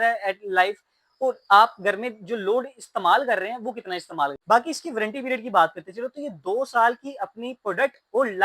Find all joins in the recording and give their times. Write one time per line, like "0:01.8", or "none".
0:04.4